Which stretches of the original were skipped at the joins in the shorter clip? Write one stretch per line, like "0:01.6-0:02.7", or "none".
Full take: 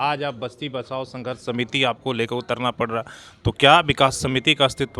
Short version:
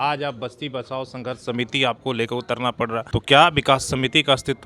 0:03.1-0:03.4